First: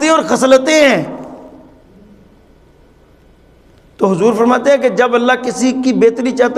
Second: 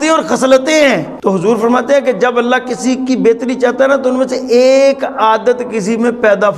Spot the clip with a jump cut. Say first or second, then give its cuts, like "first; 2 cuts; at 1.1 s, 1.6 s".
second; 1 cut; at 1.1 s